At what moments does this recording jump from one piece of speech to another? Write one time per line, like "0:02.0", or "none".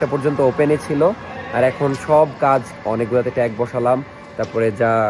none